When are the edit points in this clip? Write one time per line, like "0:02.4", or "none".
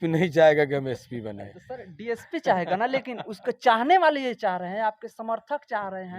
none